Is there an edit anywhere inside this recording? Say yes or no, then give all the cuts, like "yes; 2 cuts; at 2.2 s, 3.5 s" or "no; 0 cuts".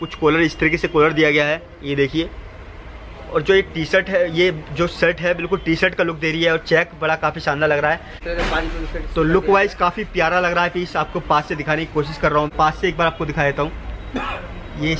yes; 2 cuts; at 8.2 s, 12.5 s